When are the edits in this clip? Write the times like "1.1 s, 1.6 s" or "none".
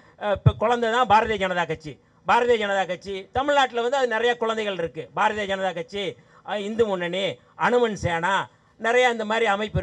none